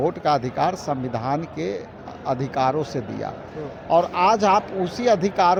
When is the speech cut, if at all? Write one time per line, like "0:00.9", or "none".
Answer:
none

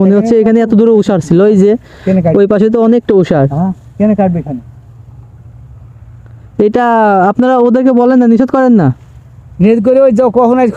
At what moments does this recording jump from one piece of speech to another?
none

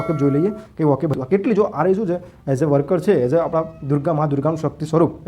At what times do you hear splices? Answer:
0:01.2

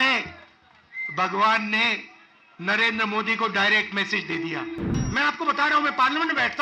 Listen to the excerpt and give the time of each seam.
0:05.0

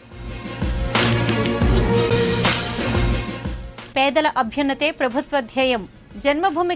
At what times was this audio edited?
0:02.0

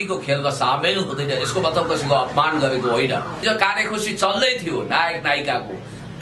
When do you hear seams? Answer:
0:03.4

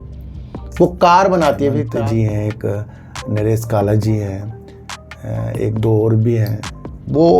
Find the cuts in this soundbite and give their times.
0:01.8

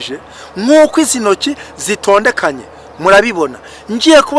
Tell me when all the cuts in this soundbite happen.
none

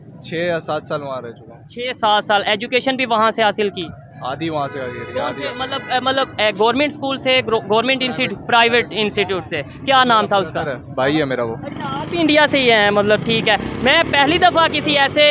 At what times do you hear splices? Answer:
none

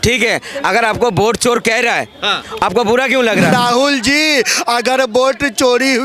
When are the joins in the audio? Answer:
0:03.5

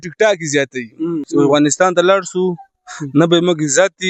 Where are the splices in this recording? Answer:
0:01.2

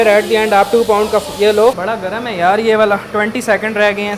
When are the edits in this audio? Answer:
0:01.7

